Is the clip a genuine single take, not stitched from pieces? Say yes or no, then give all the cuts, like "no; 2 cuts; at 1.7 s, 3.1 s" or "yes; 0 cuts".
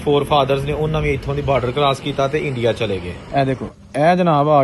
no; 1 cut; at 3.1 s